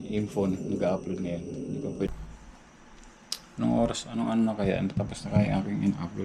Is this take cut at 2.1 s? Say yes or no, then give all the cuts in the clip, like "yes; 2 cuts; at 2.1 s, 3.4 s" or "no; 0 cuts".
yes; 1 cut; at 2.1 s